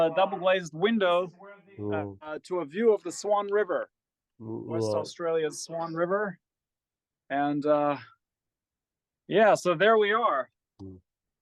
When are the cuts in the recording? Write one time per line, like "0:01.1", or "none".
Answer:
none